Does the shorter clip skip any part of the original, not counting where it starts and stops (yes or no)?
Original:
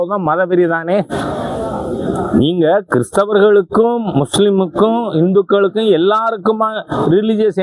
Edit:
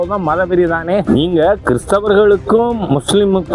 yes